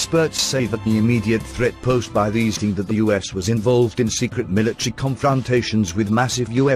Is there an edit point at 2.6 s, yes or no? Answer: no